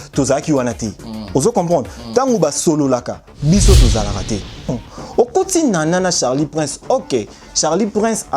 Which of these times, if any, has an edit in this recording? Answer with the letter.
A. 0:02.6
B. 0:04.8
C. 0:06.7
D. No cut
B